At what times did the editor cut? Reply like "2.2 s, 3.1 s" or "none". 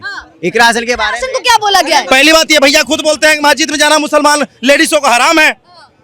2.1 s